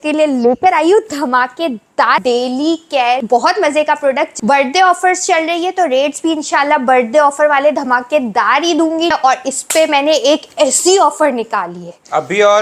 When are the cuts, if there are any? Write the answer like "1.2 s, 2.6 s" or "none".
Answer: 2.2 s, 3.2 s, 4.3 s, 9.1 s